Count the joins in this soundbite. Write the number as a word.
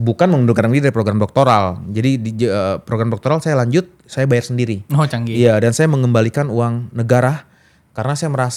zero